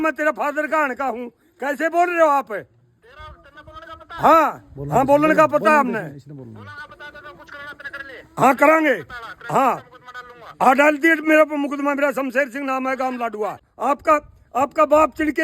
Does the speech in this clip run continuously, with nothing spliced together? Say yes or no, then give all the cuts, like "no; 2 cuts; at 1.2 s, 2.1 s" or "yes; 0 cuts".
no; 1 cut; at 13.7 s